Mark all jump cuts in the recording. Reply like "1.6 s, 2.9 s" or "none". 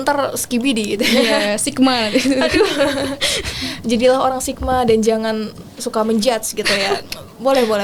none